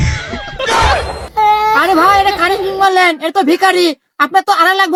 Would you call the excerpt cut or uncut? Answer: uncut